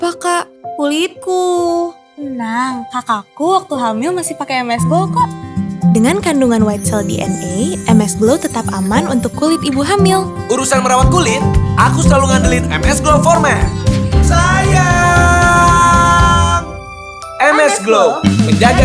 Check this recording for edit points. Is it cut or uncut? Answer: uncut